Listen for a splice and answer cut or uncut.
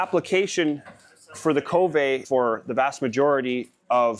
cut